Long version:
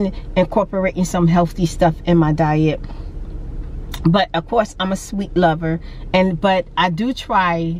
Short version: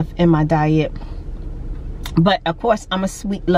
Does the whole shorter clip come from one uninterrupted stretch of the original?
yes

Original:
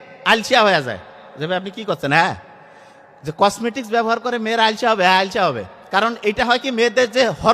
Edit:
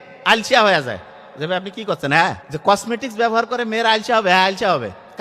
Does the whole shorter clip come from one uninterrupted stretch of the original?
no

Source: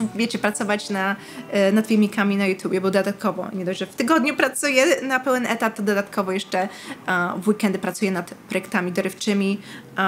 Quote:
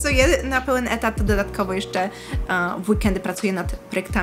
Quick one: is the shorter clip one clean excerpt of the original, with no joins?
yes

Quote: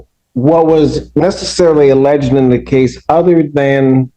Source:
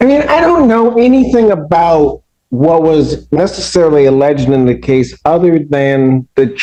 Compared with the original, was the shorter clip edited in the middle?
no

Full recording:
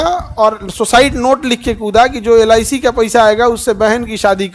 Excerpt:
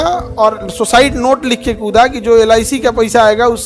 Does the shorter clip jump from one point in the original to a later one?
no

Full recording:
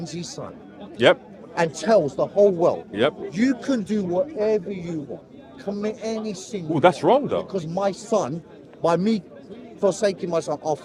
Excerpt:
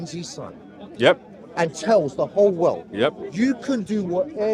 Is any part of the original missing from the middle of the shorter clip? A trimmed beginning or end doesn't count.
no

